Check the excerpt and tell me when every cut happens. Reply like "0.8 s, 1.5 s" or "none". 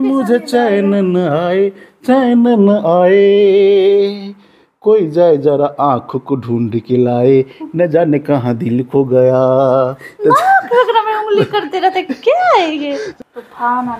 13.1 s